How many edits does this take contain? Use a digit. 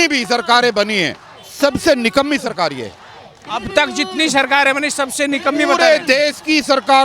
0